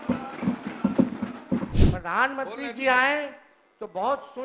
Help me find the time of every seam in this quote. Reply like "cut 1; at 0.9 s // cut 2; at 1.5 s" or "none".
cut 1; at 1.7 s